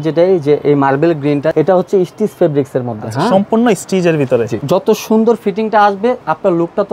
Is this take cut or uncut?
cut